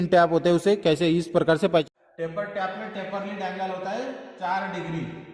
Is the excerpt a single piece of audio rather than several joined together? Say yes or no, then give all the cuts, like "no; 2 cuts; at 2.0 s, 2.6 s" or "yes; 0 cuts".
no; 1 cut; at 1.8 s